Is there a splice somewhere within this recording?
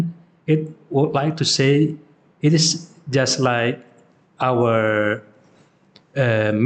no; 0 cuts

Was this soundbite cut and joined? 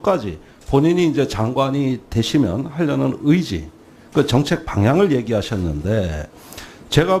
yes; 1 cut; at 4.6 s

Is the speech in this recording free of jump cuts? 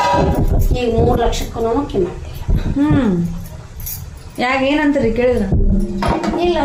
yes; 0 cuts

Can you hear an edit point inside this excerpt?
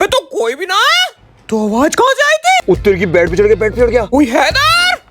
yes; 2 cuts; at 2.6 s, 4.1 s

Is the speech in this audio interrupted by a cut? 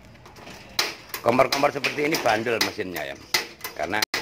no; 0 cuts

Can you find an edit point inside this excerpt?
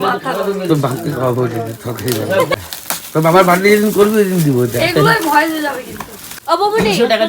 yes; 2 cuts; at 2.6 s, 6.4 s

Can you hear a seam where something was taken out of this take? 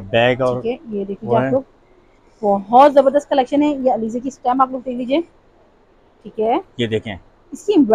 no; 0 cuts

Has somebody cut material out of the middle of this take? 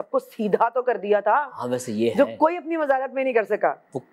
no; 0 cuts

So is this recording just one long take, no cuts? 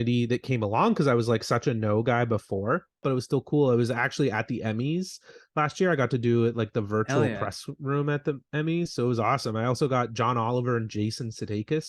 no; 1 cut; at 3.0 s

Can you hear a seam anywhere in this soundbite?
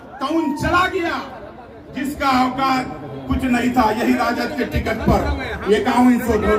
no; 0 cuts

